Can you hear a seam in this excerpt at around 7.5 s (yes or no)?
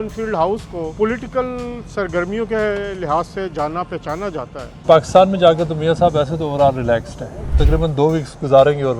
yes